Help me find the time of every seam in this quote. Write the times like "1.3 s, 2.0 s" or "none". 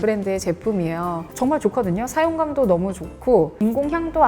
1.3 s